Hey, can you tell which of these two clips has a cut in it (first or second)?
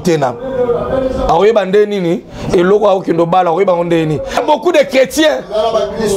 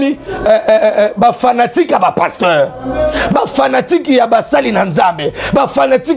first